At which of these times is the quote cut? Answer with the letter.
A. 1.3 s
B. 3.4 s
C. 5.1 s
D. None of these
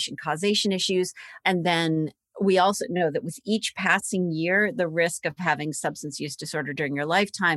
A